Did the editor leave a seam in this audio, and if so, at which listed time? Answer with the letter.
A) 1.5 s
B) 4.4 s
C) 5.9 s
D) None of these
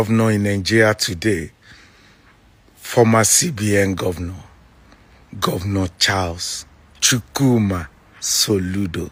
D